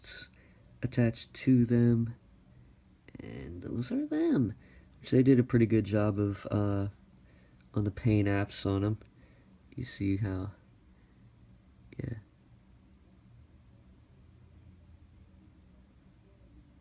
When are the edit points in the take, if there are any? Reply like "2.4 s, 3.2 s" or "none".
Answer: 5.3 s